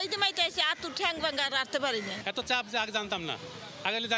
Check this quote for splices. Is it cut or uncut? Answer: cut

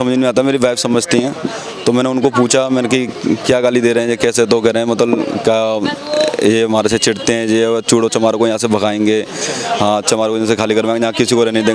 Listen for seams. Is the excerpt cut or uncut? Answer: uncut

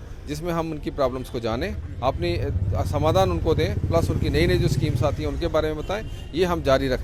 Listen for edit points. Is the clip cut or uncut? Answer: uncut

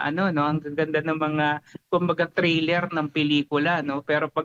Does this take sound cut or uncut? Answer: uncut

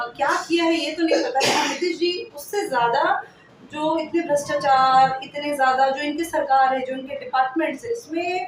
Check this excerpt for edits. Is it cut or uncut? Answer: uncut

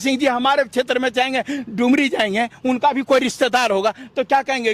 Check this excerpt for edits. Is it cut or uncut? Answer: uncut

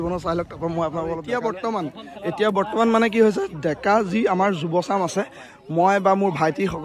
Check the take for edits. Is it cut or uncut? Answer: cut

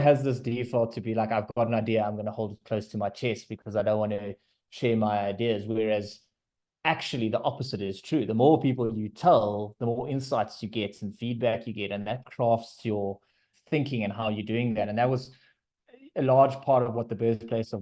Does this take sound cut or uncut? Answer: cut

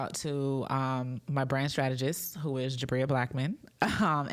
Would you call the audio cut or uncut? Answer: uncut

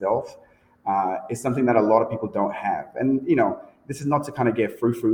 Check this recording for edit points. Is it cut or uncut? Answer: uncut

